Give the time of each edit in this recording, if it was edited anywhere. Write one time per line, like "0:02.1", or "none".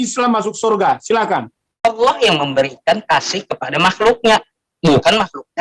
0:01.8